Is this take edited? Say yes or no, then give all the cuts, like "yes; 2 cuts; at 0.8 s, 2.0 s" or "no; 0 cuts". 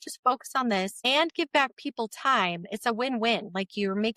yes; 1 cut; at 1.0 s